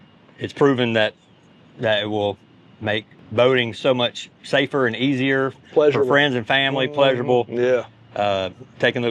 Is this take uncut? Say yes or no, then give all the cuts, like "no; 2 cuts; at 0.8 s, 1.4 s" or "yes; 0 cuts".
no; 1 cut; at 3.2 s